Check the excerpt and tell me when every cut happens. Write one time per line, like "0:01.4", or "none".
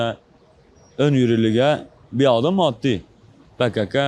none